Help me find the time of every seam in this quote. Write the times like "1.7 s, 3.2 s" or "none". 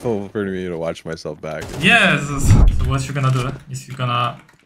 2.5 s